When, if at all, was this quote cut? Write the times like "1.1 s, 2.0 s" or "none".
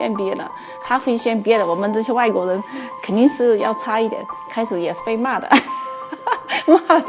none